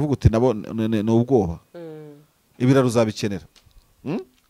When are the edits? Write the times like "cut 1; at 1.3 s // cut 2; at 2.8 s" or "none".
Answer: none

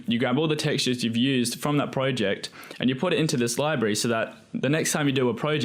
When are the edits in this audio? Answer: none

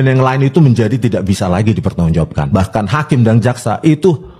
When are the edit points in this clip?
cut 1; at 2.4 s

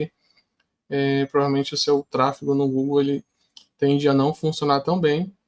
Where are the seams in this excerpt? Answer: cut 1; at 2.1 s

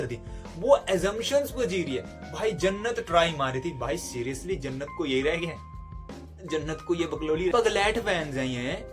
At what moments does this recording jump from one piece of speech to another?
cut 1; at 7.5 s

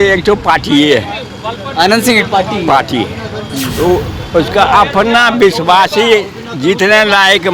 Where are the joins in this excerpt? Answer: none

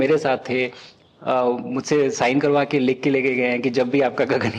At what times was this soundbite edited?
none

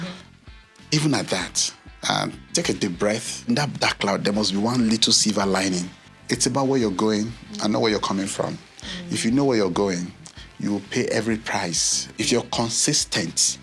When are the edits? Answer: cut 1; at 3.5 s // cut 2; at 6.0 s // cut 3; at 12.2 s

